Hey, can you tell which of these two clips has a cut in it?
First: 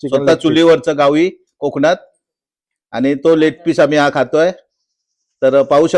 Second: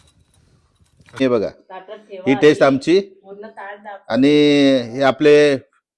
second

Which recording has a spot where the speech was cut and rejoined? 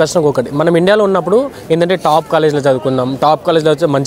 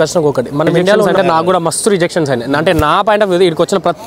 second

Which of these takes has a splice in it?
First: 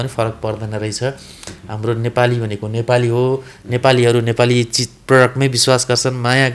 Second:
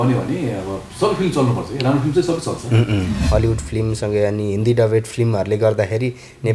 second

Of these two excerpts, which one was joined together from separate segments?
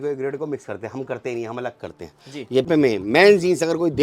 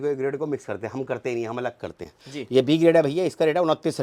first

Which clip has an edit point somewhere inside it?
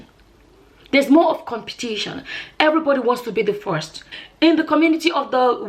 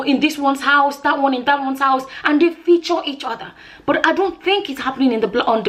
first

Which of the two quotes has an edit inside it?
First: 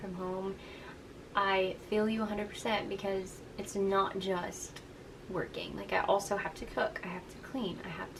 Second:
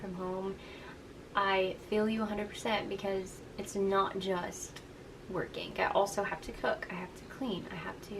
second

